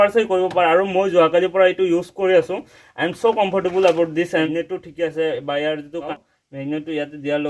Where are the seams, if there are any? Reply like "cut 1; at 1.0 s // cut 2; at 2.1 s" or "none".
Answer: cut 1; at 4.5 s // cut 2; at 6.1 s